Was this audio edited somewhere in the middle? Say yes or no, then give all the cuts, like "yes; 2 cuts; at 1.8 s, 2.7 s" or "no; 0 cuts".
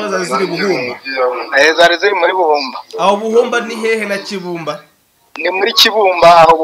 no; 0 cuts